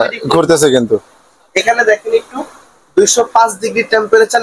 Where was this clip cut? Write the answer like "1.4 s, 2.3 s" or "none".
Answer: none